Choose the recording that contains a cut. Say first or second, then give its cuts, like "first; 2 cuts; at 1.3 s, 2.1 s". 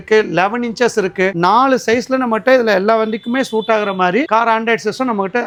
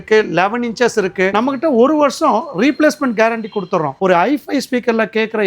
second; 2 cuts; at 1.3 s, 3.9 s